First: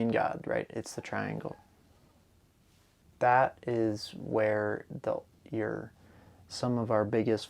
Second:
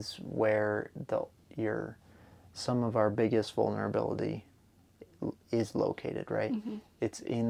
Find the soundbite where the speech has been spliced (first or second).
first